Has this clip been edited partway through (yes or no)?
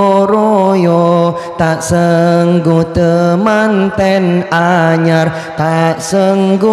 no